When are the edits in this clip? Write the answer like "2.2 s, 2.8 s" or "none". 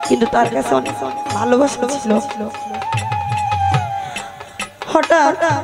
none